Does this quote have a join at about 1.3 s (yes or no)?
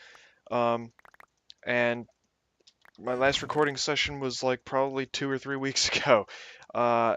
no